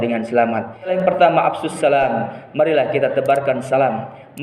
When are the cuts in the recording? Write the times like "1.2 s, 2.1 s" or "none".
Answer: 0.9 s